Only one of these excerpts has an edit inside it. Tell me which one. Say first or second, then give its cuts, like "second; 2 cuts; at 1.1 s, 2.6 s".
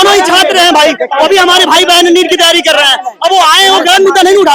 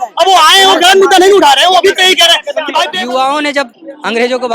second; 1 cut; at 2.9 s